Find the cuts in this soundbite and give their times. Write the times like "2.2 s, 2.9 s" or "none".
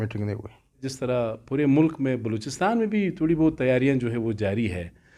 0.9 s